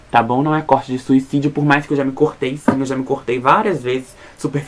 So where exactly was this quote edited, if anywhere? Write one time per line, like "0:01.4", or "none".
none